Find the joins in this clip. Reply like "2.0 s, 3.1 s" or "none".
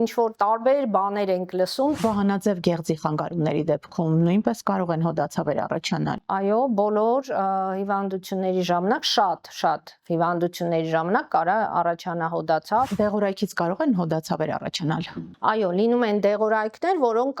2.0 s, 12.9 s